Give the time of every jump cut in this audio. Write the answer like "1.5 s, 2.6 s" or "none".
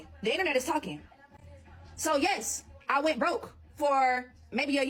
none

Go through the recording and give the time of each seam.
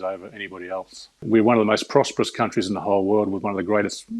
1.1 s

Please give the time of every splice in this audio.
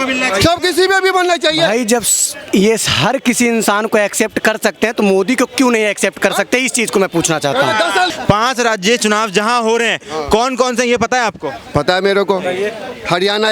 8.1 s

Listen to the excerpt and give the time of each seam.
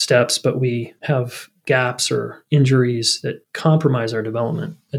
0.9 s

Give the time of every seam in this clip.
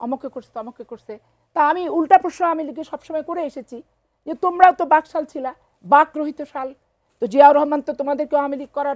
none

